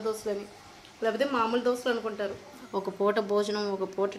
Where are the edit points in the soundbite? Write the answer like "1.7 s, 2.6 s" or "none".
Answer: 2.5 s